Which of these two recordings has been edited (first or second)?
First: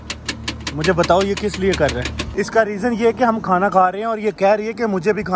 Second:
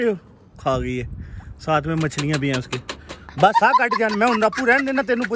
first